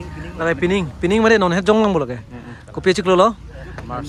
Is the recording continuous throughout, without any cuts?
yes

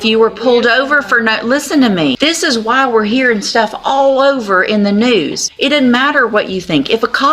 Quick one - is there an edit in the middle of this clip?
yes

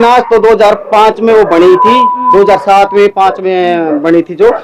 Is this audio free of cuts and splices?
yes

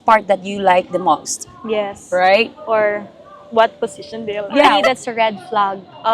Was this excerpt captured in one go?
no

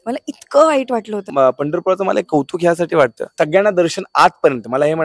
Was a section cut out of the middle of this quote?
yes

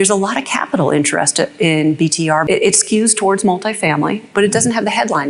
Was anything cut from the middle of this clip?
yes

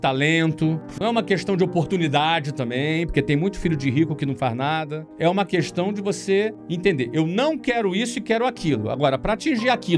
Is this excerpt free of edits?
no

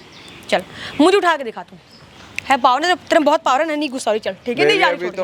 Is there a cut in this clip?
no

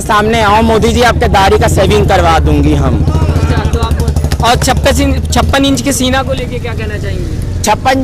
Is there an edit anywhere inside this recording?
no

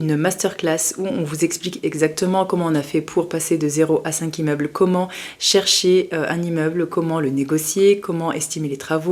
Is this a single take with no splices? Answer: yes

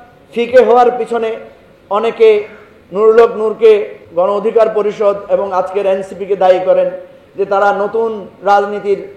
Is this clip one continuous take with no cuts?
no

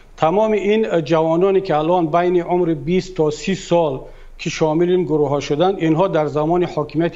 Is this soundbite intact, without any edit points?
yes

